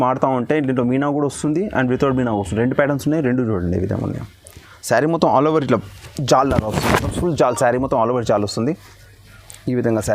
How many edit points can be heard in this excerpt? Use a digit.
1